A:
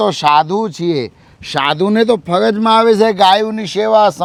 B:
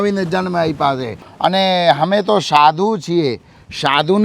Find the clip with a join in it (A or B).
B